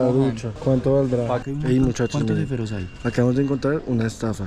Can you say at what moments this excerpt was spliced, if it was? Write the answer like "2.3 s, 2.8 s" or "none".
1.4 s

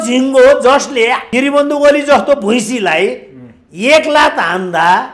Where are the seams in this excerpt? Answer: 1.2 s

